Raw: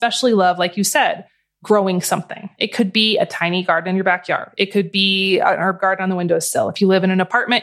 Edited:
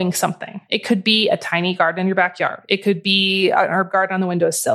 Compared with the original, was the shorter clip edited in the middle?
no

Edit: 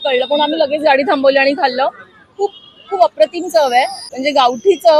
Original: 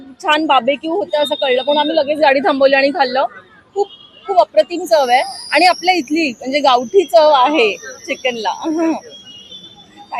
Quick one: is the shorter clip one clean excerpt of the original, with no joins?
no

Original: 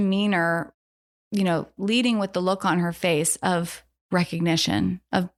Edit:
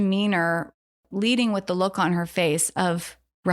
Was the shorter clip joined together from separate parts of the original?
yes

